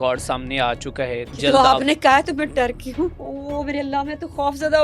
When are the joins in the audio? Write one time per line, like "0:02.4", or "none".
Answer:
0:01.4
0:03.3